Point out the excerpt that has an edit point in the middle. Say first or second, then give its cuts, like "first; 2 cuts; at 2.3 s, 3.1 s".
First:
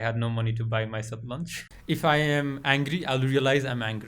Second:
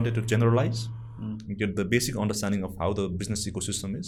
first; 1 cut; at 1.7 s